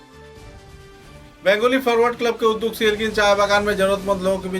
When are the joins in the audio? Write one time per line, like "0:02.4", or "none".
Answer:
0:00.9